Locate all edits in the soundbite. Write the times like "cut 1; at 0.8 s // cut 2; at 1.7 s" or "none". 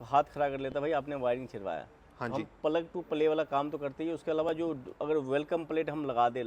none